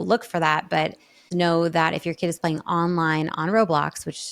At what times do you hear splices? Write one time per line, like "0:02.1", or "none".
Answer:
0:01.3